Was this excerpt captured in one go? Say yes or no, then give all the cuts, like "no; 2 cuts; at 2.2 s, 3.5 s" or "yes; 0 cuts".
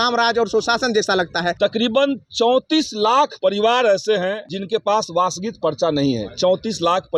no; 3 cuts; at 1.5 s, 3.3 s, 4.5 s